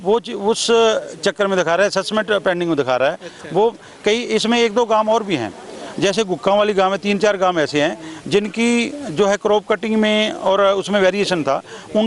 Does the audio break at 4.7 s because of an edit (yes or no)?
no